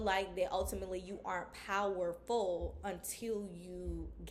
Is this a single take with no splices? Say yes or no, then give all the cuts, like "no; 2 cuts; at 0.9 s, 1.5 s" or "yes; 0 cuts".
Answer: yes; 0 cuts